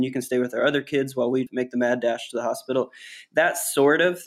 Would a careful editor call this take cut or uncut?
uncut